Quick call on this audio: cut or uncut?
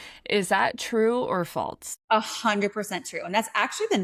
uncut